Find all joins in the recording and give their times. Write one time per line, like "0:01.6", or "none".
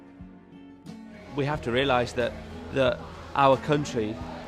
0:01.1